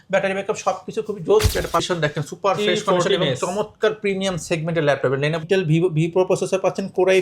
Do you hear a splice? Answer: yes; 2 cuts; at 1.8 s, 5.4 s

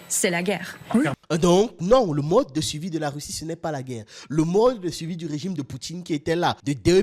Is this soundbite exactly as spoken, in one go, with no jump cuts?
no; 1 cut; at 1.2 s

